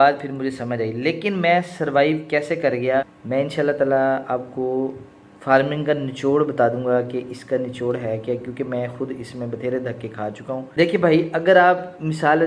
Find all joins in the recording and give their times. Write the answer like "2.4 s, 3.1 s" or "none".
3.2 s, 10.7 s